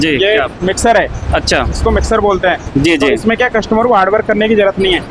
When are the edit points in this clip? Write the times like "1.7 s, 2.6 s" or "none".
none